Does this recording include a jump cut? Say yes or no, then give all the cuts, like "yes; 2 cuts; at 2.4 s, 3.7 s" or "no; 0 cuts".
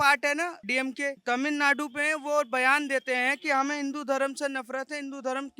yes; 1 cut; at 0.9 s